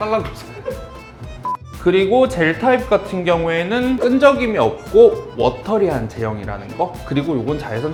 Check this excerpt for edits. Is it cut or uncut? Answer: uncut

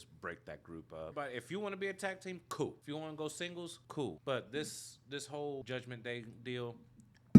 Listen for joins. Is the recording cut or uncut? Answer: cut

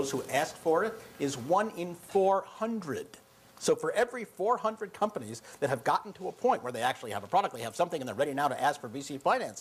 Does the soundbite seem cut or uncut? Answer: uncut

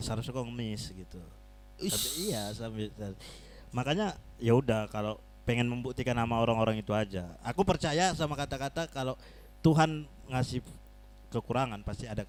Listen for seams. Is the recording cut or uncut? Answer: uncut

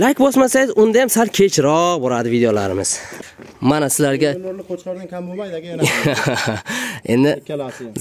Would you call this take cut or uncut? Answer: cut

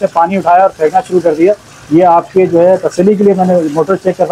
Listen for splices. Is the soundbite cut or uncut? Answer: uncut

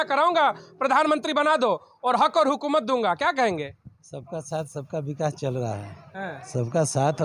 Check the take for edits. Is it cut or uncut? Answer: uncut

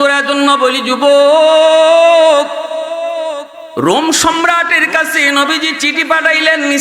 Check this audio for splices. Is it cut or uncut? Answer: cut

